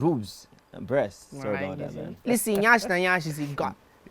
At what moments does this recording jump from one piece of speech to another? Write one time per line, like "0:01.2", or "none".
0:02.1